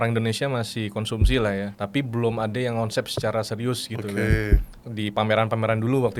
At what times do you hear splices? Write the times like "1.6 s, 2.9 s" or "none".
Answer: 1.8 s, 4.8 s